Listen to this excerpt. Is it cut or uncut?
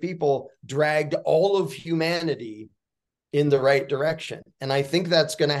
uncut